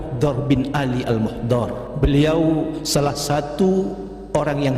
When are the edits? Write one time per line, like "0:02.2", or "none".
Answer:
0:01.9
0:02.8